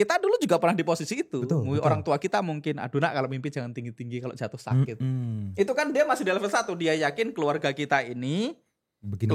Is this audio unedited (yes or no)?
yes